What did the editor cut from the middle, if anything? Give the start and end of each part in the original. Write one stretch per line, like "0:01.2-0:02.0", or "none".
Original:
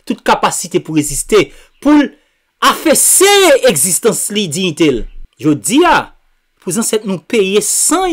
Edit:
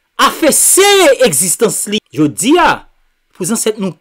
0:04.4-0:05.2